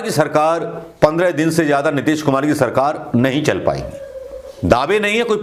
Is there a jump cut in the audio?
no; 0 cuts

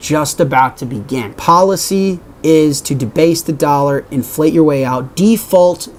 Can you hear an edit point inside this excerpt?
no; 0 cuts

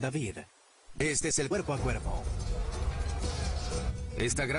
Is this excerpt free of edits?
yes; 0 cuts

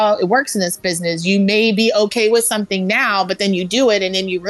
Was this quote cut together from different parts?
no; 0 cuts

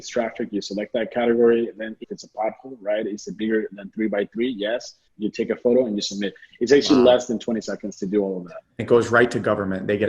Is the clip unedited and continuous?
no; 3 cuts; at 2.1 s, 5.1 s, 8.8 s

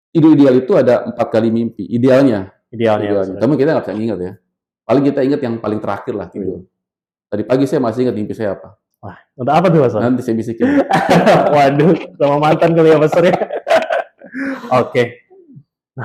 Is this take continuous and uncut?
yes; 0 cuts

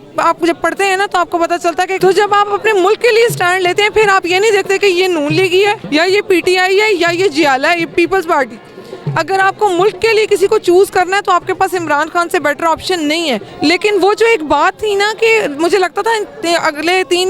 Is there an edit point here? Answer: yes; 3 cuts; at 1.9 s, 5.8 s, 13.5 s

